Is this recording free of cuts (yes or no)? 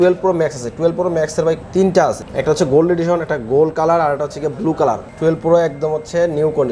no